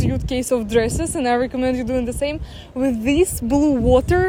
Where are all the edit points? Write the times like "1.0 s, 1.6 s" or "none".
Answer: none